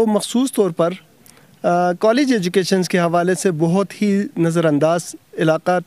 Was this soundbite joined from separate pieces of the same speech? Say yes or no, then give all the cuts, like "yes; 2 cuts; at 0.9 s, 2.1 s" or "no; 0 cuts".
no; 0 cuts